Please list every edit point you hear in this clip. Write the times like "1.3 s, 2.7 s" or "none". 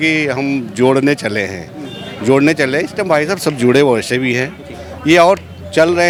none